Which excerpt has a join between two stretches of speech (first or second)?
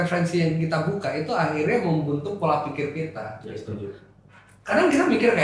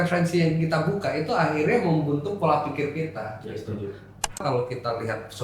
second